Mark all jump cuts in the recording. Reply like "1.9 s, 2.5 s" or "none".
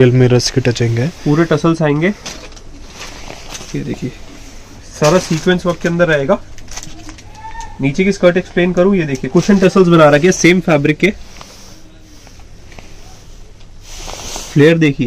none